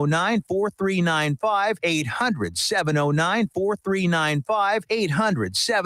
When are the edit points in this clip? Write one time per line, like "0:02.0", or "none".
0:01.8
0:04.8